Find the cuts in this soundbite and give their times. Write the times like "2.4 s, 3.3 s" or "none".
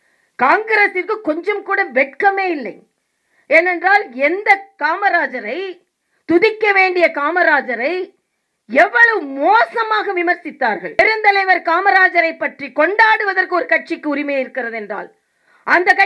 11.0 s